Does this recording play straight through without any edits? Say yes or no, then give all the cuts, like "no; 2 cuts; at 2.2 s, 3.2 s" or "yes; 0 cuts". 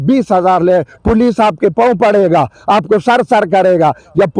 yes; 0 cuts